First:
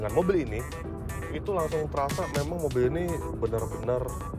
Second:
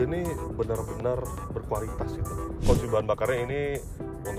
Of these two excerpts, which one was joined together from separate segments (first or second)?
second